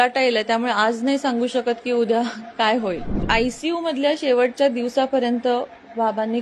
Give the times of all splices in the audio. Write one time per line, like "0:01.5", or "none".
0:03.1

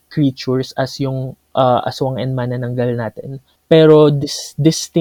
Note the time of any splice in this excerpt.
0:03.4

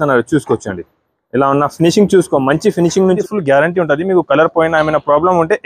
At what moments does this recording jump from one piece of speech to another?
0:03.2

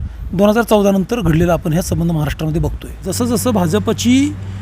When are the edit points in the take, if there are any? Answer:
0:03.0

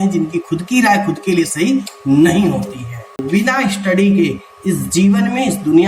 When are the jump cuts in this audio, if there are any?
0:03.2

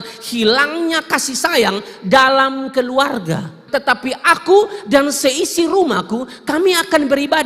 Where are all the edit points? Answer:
0:03.6

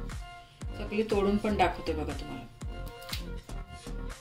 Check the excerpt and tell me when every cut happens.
0:00.8
0:02.5

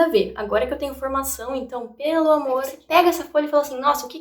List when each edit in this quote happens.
0:02.8

